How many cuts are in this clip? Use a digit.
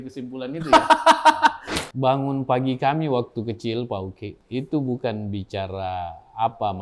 2